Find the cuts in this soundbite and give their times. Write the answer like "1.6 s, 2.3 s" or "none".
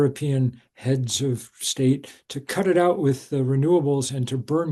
none